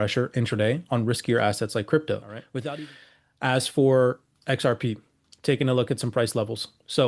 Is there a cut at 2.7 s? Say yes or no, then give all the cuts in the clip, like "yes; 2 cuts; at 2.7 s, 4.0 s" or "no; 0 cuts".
yes; 1 cut; at 2.7 s